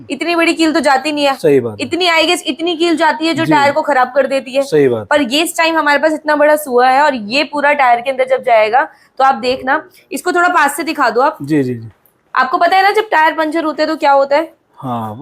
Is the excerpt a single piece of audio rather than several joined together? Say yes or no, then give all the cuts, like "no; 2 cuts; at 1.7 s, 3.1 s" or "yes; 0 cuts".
yes; 0 cuts